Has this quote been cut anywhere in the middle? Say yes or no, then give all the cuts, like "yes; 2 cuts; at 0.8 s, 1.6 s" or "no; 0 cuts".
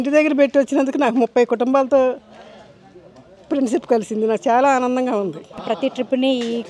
yes; 1 cut; at 5.6 s